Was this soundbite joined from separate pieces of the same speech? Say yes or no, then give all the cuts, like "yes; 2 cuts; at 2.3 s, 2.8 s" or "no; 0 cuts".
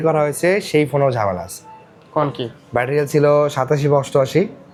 no; 0 cuts